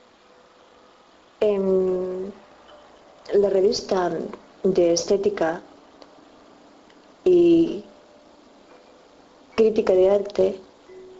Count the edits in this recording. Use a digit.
1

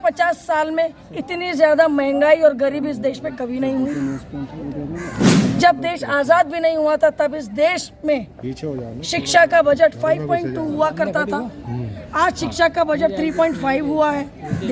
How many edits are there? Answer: 0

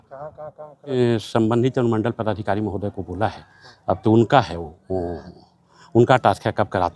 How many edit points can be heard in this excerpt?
1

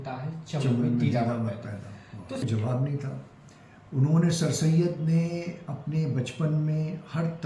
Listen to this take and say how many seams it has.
1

